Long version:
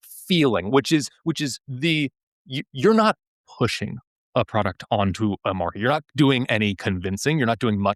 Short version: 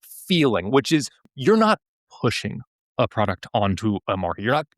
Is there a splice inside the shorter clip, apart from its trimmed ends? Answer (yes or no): yes